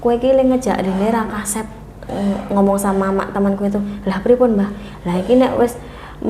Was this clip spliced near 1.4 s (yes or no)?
no